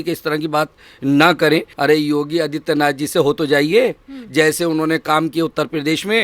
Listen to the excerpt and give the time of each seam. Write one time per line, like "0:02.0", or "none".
0:01.7